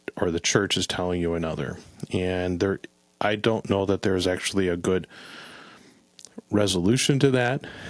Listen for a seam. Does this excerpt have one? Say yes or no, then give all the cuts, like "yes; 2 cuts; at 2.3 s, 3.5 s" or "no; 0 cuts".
no; 0 cuts